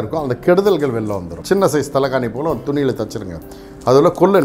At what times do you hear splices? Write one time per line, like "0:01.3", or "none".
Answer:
0:01.3